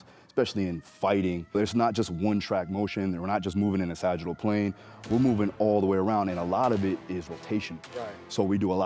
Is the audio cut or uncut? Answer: uncut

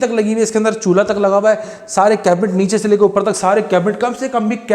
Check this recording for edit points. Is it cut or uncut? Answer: uncut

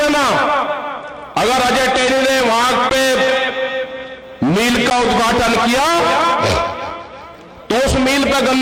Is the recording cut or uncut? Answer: uncut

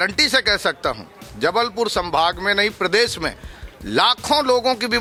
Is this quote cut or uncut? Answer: uncut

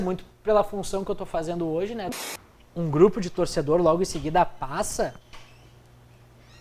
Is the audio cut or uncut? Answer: cut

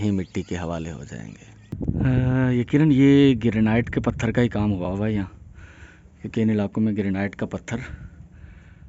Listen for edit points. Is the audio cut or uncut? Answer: cut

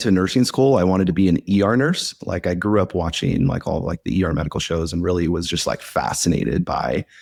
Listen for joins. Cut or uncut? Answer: uncut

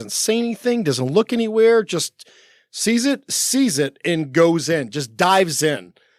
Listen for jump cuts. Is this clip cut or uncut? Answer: uncut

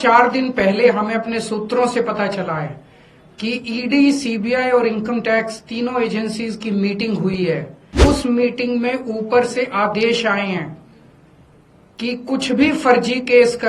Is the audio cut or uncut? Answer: cut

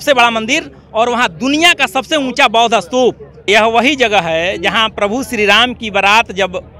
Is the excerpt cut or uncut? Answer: cut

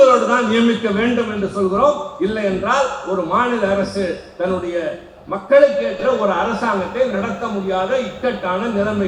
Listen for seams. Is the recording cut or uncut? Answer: uncut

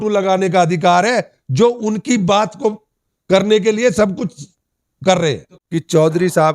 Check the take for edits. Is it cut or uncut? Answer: cut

